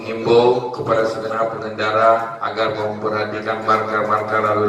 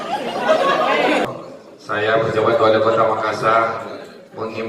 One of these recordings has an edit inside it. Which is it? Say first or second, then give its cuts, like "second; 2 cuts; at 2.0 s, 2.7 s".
second; 1 cut; at 1.2 s